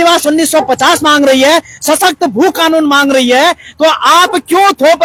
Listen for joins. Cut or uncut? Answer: uncut